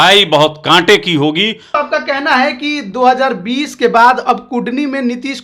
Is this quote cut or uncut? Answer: cut